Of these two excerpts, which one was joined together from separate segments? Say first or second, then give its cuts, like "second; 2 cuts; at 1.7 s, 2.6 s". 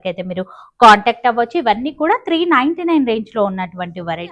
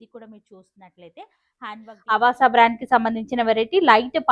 second; 1 cut; at 1.9 s